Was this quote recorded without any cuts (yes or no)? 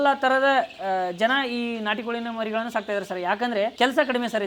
yes